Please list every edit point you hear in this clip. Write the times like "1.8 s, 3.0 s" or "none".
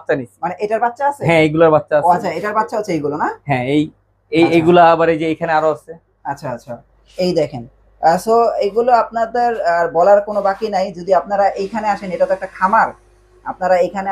none